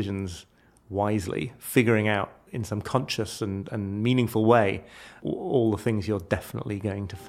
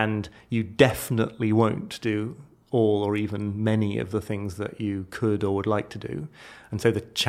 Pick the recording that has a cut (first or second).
first